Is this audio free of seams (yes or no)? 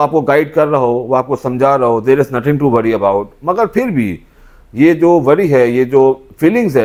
yes